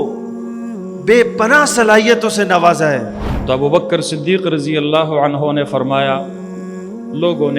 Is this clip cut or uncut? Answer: cut